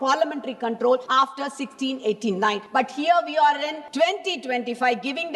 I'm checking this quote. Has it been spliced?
yes; 3 cuts; at 1.1 s, 2.6 s, 3.8 s

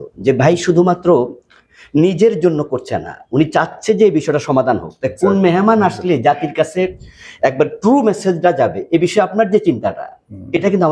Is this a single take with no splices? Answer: yes; 0 cuts

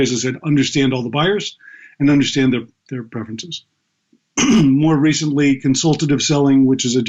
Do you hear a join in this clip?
no; 0 cuts

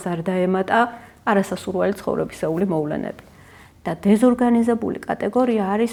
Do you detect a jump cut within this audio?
no; 0 cuts

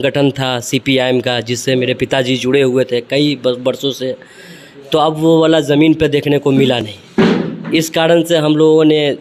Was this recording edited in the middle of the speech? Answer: no; 0 cuts

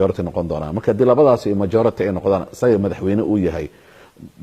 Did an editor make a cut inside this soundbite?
yes; 1 cut; at 1.1 s

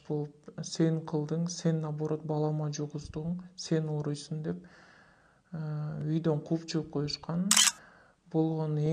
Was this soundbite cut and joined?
yes; 1 cut; at 7.7 s

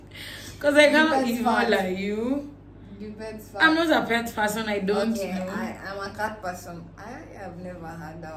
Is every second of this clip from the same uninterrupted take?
yes; 0 cuts

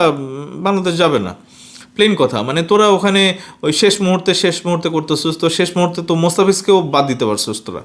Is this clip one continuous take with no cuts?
yes; 0 cuts

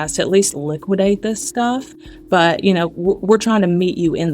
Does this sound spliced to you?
yes; 1 cut; at 1.9 s

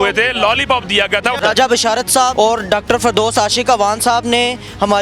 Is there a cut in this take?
yes; 2 cuts; at 1.4 s, 2.3 s

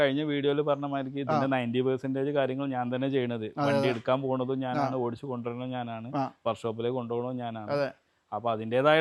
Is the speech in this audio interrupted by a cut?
no; 0 cuts

